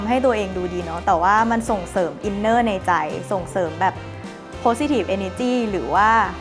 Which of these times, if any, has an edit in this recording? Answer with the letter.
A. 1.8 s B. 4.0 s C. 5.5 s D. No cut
D